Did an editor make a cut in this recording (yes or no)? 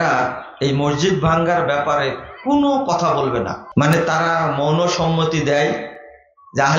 yes